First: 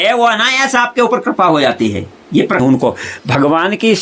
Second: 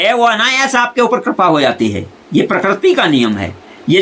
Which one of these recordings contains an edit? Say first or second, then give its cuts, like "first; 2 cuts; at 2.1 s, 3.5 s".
first; 1 cut; at 2.6 s